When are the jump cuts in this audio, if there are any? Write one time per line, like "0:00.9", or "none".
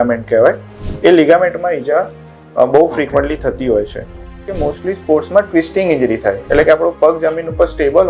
0:04.5